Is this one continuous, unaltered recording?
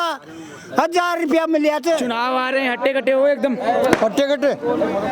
no; 1 cut; at 2.1 s

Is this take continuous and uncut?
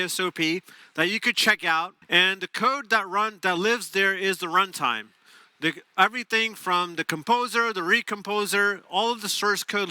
no; 1 cut; at 2.0 s

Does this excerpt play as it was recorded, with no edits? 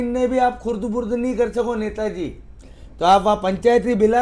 yes; 0 cuts

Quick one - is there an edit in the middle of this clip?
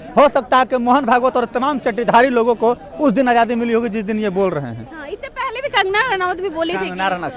no; 0 cuts

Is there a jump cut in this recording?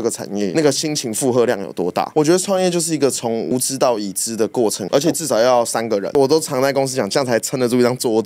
yes; 3 cuts; at 2.1 s, 4.8 s, 6.1 s

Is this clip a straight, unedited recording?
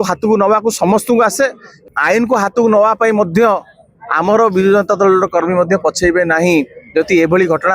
no; 1 cut; at 1.8 s

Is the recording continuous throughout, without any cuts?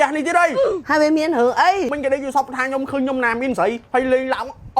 no; 2 cuts; at 1.9 s, 3.8 s

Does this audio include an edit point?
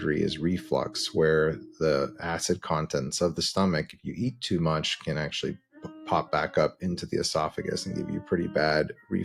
no; 0 cuts

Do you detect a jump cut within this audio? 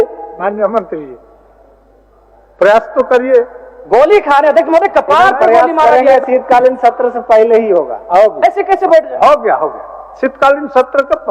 no; 0 cuts

